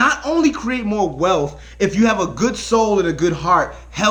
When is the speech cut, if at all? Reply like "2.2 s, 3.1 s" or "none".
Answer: none